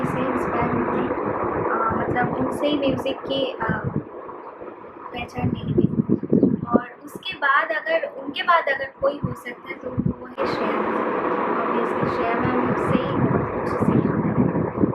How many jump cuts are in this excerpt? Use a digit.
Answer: 0